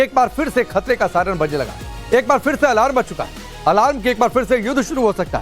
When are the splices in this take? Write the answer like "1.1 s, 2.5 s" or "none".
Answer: 1.5 s